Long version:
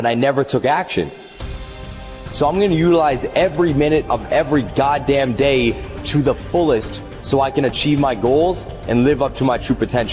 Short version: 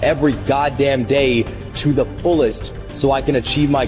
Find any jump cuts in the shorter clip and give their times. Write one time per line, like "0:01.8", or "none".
none